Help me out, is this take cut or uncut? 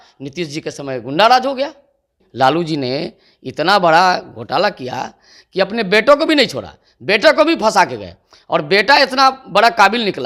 cut